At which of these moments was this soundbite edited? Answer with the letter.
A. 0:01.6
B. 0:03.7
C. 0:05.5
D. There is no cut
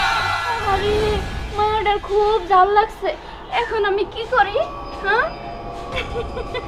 D